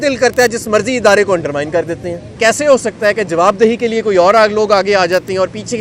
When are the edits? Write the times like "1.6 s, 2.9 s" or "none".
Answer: 2.4 s